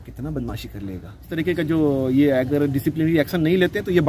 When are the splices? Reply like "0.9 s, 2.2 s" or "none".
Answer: 1.3 s

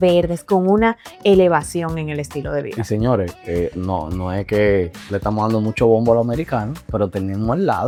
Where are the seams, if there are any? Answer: none

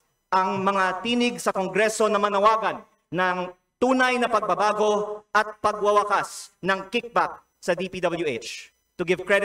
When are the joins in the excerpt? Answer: none

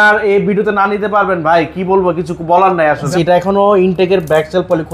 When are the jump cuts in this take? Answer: 3.1 s

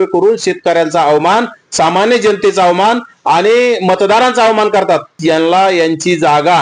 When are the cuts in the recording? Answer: 5.1 s

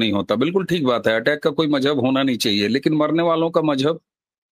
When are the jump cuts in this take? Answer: none

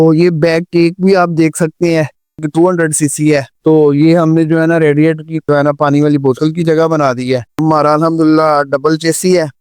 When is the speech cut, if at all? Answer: 2.5 s, 7.6 s

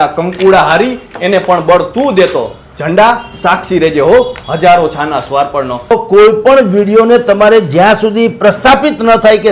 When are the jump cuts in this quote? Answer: 5.9 s

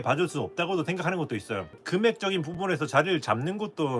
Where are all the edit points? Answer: 1.8 s

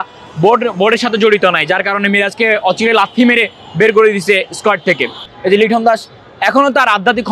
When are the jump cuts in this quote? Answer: 5.3 s

